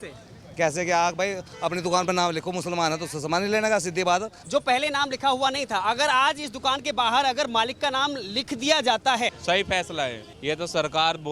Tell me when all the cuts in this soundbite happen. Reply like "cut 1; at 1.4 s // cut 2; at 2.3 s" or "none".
cut 1; at 4.4 s // cut 2; at 9.4 s // cut 3; at 10.3 s